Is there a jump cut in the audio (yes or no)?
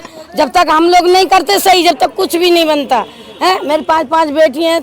no